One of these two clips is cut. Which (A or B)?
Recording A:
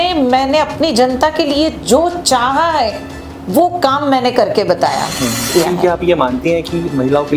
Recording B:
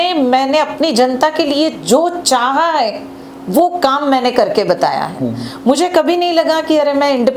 A